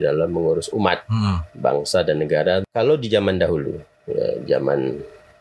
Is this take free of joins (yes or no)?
no